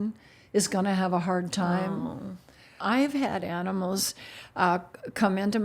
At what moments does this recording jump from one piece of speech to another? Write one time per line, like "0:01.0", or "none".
0:02.8